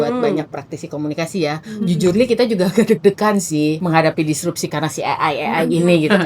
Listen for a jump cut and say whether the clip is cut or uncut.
cut